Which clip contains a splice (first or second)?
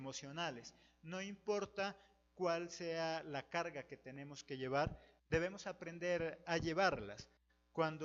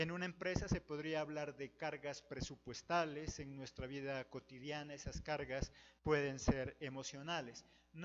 second